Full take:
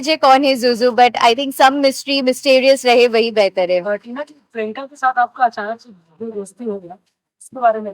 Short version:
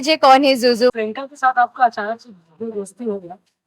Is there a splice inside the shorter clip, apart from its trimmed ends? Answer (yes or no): yes